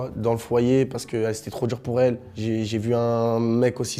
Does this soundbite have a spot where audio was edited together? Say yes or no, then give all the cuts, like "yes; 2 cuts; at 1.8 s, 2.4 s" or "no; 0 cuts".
no; 0 cuts